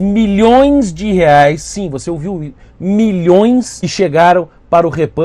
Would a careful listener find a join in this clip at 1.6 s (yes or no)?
no